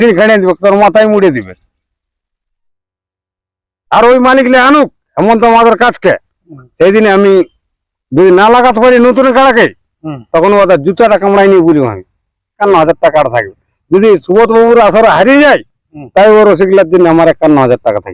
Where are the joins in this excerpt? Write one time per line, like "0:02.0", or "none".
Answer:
0:12.6